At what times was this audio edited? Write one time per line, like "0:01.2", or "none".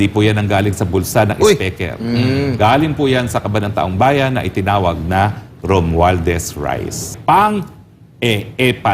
0:07.1